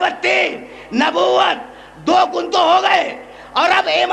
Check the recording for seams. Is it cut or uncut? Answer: uncut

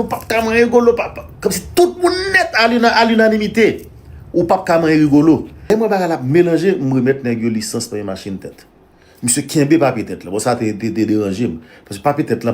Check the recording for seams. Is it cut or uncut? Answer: cut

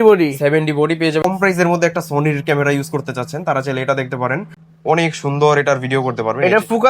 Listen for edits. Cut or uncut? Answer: cut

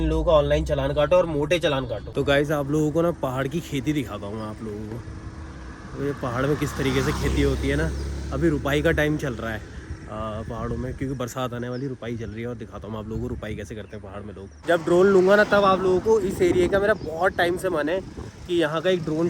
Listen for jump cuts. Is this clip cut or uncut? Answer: cut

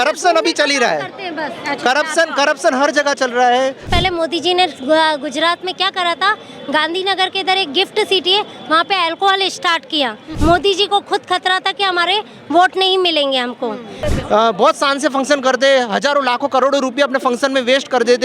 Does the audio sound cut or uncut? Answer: cut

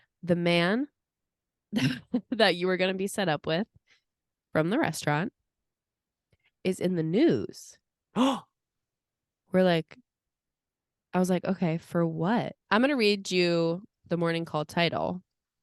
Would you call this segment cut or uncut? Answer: cut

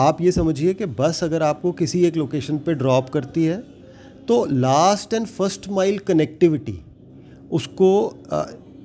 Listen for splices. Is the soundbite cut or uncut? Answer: uncut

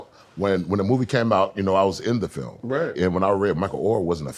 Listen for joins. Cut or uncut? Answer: cut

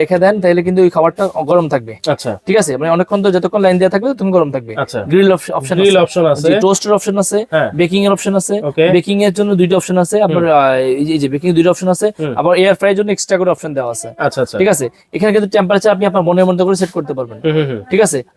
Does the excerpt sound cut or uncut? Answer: uncut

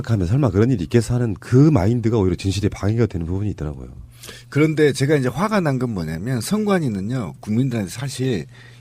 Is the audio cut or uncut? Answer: cut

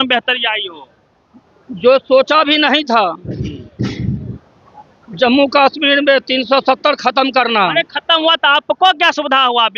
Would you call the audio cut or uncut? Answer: uncut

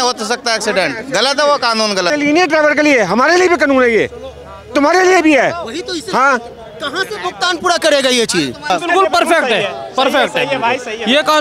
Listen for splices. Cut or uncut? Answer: cut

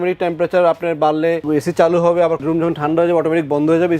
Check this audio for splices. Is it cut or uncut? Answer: cut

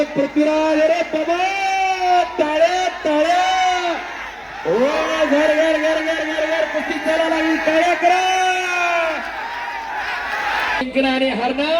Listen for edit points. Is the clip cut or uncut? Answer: cut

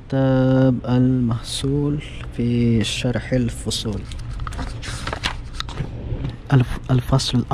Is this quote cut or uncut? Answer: cut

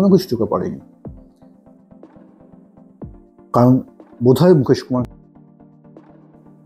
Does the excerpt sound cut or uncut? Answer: cut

